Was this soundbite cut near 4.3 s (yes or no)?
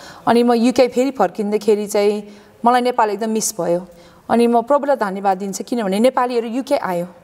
no